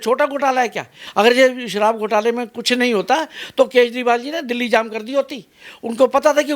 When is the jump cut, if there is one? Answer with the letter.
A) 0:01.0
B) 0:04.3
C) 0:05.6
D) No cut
A